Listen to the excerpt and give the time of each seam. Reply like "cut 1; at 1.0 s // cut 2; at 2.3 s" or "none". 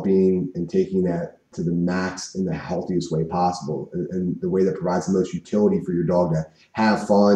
cut 1; at 1.5 s